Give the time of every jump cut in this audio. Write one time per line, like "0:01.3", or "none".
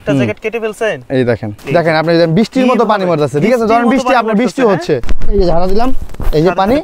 0:01.5
0:05.0